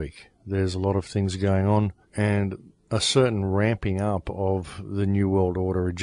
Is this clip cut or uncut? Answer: cut